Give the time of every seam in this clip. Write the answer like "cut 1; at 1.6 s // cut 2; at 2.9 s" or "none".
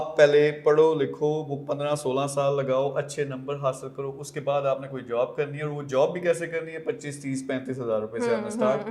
none